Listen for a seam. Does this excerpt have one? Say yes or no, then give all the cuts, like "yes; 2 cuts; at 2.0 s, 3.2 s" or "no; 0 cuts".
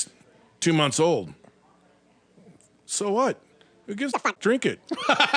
yes; 1 cut; at 4.3 s